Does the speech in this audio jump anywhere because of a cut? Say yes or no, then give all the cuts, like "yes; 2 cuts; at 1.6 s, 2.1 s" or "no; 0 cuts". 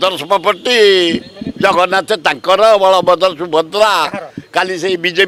no; 0 cuts